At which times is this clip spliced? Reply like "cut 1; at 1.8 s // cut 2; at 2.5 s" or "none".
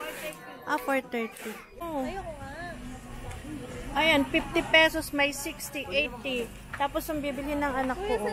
cut 1; at 1.9 s